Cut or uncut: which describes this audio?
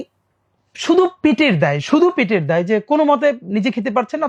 uncut